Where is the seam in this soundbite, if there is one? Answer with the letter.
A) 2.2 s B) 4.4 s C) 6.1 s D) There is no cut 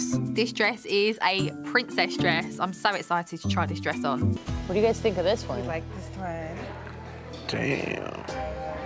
B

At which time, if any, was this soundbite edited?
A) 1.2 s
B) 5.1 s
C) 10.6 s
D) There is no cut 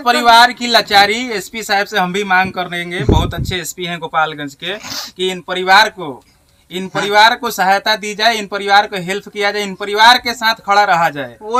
D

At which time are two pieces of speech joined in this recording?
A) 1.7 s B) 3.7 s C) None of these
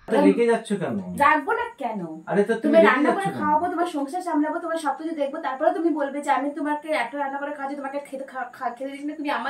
C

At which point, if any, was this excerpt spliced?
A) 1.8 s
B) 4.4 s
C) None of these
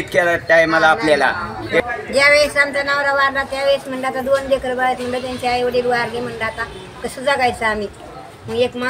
A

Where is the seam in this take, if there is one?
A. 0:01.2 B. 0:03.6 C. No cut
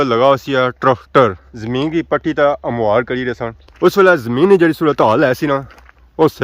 B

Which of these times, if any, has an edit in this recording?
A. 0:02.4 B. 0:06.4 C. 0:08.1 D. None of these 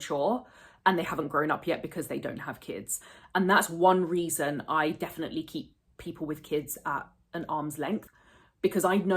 C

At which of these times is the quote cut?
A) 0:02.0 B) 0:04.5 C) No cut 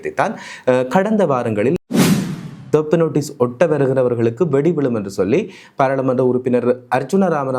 A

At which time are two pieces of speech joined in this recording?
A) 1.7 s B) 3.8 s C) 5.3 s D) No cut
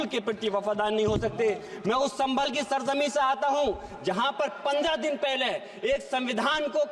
D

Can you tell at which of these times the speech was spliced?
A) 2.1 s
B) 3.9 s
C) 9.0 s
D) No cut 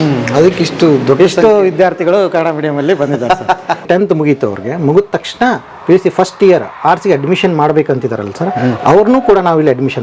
B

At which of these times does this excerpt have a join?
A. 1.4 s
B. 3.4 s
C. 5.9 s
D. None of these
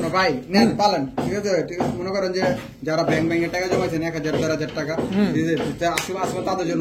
D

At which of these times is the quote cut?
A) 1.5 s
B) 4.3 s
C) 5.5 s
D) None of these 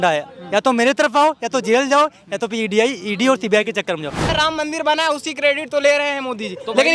B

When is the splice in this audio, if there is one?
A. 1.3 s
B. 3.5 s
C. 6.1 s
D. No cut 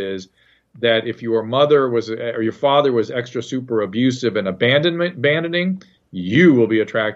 D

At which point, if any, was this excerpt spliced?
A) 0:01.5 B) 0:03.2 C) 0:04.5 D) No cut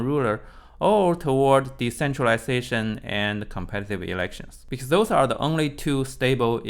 C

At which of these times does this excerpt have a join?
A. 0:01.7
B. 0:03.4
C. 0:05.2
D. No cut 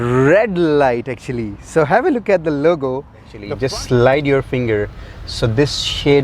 B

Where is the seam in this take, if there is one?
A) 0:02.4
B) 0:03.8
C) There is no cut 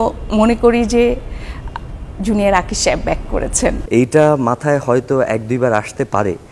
B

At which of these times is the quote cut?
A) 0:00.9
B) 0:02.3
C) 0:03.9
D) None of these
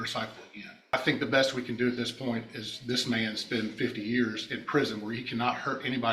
A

